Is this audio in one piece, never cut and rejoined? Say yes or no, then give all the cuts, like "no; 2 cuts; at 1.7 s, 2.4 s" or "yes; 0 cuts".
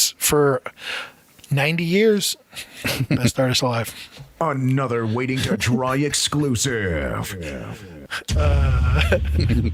yes; 0 cuts